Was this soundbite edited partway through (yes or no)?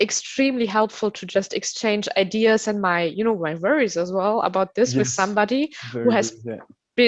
no